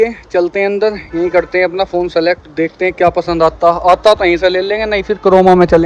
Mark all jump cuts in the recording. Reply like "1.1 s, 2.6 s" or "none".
none